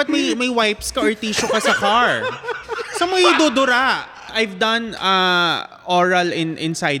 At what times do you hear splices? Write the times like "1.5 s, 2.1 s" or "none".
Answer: 4.2 s